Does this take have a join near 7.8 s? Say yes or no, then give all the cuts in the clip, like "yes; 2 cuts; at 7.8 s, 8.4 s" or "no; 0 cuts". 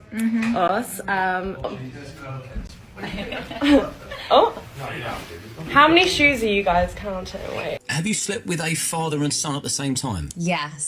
yes; 1 cut; at 7.8 s